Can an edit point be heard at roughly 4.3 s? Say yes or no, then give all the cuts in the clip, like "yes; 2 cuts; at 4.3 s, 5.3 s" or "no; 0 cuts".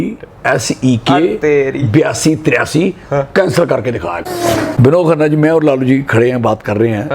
yes; 1 cut; at 4.3 s